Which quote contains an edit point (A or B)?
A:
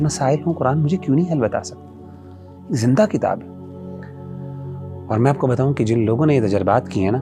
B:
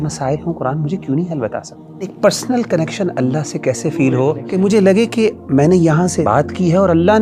B